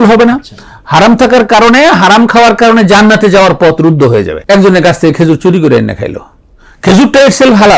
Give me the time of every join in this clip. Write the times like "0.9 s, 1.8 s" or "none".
4.3 s